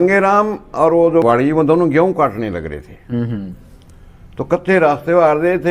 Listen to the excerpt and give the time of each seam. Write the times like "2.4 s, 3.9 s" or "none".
1.2 s